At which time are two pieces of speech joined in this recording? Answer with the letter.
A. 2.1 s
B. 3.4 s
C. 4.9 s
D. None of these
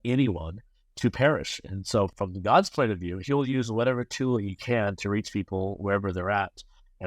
A